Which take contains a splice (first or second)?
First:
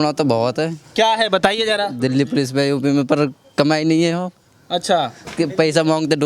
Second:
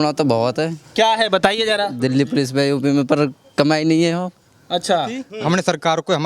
second